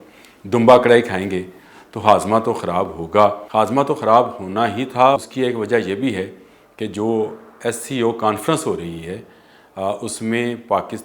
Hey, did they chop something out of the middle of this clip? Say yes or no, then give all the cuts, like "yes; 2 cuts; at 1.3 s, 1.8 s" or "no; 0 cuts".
yes; 2 cuts; at 3.4 s, 5.2 s